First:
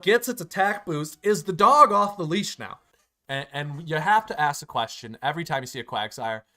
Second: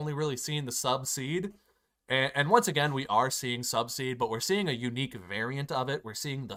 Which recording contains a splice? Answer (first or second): first